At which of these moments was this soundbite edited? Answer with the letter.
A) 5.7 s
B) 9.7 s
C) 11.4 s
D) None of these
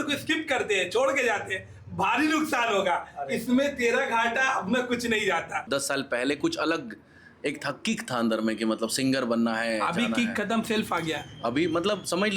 A